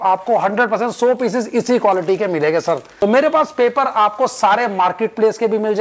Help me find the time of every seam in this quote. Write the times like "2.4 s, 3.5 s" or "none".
2.9 s